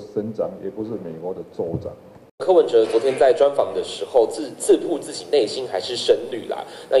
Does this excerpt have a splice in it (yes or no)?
yes